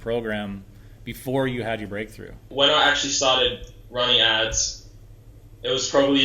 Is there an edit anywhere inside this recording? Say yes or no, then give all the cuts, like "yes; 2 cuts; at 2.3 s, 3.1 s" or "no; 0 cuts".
yes; 1 cut; at 2.4 s